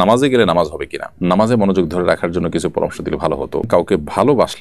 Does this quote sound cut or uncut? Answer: cut